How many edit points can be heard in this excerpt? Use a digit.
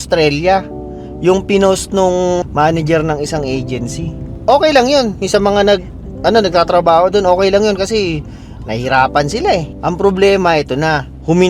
2